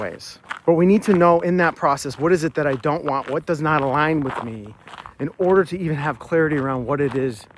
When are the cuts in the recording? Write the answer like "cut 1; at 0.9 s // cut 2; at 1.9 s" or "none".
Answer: none